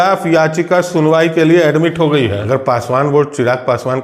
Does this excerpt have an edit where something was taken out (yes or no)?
yes